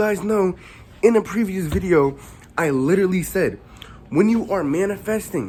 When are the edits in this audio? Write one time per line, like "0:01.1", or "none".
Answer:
none